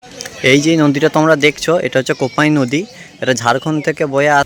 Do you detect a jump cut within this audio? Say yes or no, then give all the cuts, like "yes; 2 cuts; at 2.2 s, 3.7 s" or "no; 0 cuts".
no; 0 cuts